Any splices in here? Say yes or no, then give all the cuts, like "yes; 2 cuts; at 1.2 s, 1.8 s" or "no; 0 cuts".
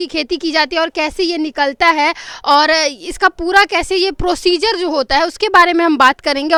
no; 0 cuts